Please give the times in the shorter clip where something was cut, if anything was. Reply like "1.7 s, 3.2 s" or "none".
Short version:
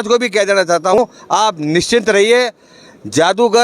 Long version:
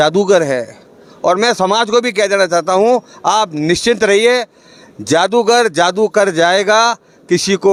1.0 s